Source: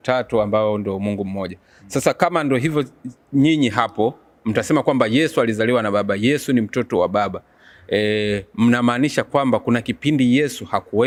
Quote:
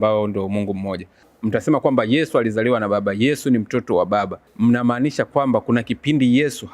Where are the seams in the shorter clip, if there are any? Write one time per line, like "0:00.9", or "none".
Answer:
0:01.2
0:04.5